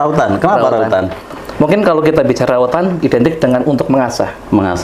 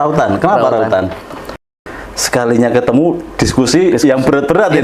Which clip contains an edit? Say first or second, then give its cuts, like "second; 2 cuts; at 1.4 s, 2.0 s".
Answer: second; 1 cut; at 1.5 s